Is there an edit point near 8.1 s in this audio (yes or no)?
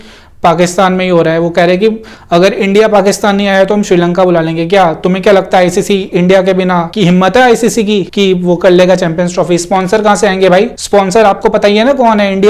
yes